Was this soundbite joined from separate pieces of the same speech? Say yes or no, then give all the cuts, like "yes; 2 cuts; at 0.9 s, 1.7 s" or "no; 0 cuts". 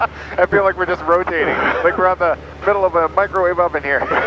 no; 0 cuts